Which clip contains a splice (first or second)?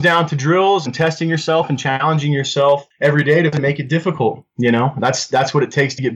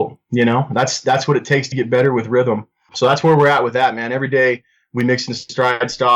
first